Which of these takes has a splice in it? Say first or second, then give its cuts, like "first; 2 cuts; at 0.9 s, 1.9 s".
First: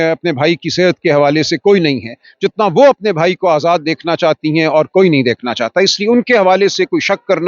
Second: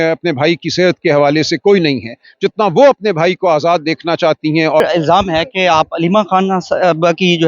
second; 1 cut; at 4.8 s